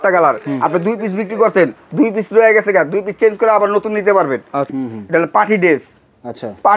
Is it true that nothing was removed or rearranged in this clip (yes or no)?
no